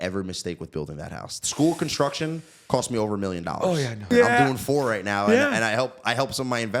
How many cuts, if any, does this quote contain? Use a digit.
1